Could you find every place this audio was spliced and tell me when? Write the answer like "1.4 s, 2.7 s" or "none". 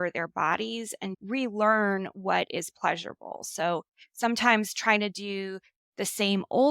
1.2 s